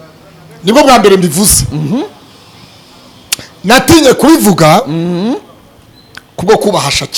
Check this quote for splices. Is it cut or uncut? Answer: uncut